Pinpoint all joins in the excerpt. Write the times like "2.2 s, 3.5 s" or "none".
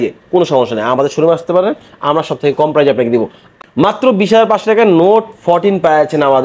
3.6 s

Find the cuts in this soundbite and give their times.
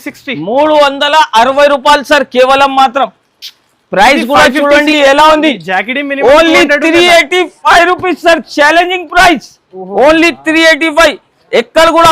4.9 s

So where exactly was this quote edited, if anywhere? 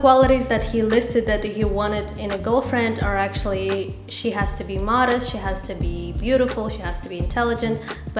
none

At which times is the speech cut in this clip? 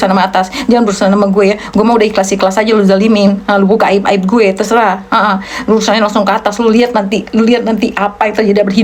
none

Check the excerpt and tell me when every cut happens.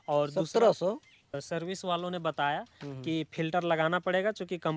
1.4 s

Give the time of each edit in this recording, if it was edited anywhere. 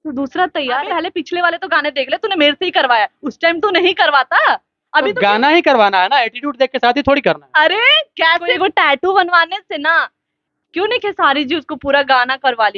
0.9 s, 8.6 s

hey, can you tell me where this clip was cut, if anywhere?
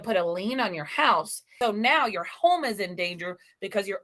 1.5 s

